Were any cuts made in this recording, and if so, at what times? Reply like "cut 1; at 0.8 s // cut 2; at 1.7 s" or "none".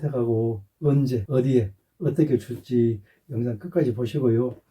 cut 1; at 1.2 s // cut 2; at 3.1 s